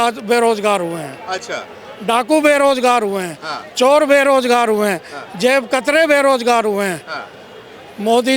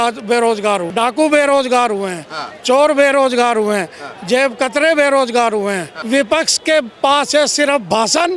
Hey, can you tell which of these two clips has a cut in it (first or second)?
second